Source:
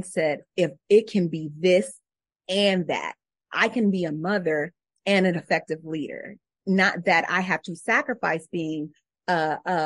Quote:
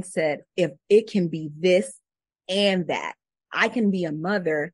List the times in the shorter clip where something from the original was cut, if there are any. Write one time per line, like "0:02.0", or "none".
none